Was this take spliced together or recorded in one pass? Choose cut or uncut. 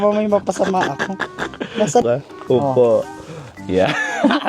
cut